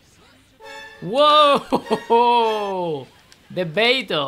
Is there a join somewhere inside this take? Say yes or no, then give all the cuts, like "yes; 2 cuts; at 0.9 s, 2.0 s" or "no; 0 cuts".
yes; 1 cut; at 1.0 s